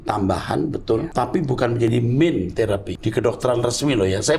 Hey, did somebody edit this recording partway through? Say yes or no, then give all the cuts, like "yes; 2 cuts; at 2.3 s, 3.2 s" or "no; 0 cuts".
yes; 2 cuts; at 1.1 s, 3.0 s